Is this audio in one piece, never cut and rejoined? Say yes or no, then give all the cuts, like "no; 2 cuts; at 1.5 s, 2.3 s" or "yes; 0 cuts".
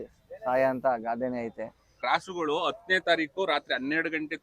no; 1 cut; at 2.0 s